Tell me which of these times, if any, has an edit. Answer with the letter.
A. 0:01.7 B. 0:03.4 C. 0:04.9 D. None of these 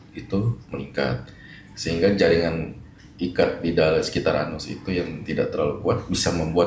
D